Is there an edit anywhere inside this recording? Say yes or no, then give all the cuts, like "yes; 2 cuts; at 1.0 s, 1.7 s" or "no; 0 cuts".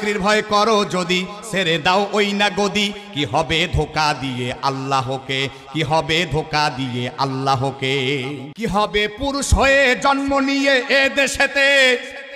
yes; 1 cut; at 8.5 s